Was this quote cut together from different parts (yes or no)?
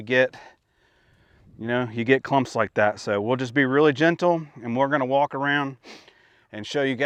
no